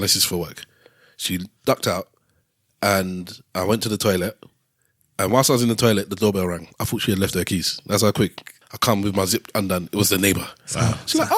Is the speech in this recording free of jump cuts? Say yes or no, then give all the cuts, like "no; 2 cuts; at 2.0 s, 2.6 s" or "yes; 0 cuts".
no; 1 cut; at 8.5 s